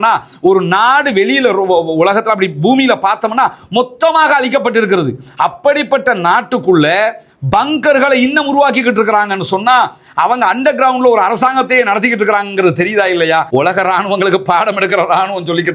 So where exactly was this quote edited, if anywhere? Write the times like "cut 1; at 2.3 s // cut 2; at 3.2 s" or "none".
cut 1; at 13.5 s